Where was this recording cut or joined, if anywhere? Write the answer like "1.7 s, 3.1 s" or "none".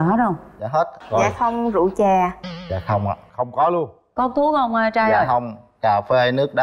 1.0 s